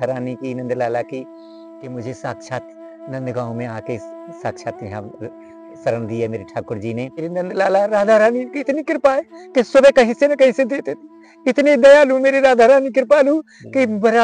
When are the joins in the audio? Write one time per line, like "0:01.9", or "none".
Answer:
0:07.2